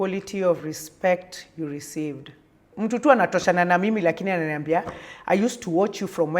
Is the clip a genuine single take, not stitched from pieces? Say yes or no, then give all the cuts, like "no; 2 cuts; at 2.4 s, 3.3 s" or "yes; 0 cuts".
no; 1 cut; at 2.6 s